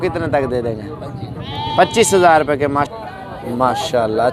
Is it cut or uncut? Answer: cut